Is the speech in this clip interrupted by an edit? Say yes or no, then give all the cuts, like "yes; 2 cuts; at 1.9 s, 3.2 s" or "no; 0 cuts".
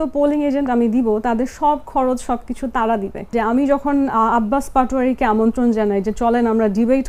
yes; 1 cut; at 3.3 s